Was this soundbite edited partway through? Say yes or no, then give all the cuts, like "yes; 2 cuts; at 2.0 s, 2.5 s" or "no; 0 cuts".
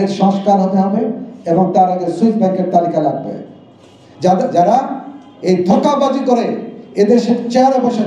yes; 1 cut; at 4.2 s